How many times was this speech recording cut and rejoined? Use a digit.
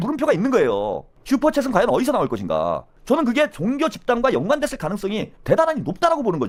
0